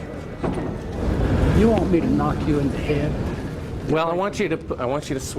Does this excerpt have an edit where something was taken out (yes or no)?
yes